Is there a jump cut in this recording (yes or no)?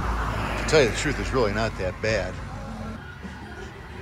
yes